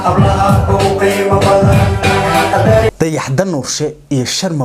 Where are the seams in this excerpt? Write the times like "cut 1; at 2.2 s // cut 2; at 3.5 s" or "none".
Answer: cut 1; at 2.9 s